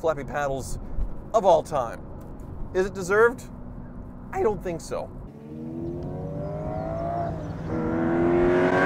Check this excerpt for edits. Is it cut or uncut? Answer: cut